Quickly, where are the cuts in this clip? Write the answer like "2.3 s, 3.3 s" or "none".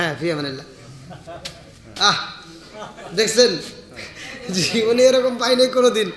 none